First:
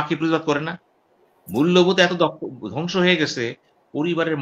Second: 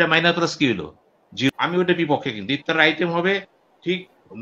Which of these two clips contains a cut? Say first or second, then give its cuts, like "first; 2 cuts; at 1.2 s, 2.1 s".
second; 1 cut; at 1.5 s